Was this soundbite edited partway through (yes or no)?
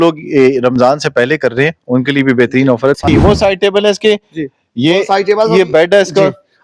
yes